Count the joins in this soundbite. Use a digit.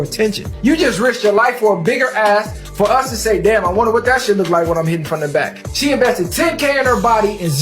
0